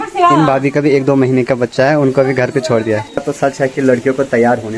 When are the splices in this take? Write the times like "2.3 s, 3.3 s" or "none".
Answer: 3.2 s